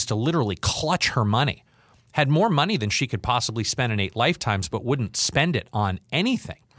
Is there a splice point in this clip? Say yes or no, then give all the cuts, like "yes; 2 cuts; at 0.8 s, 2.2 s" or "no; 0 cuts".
no; 0 cuts